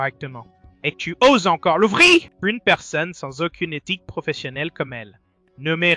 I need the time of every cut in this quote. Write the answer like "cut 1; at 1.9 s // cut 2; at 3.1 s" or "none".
cut 1; at 2.3 s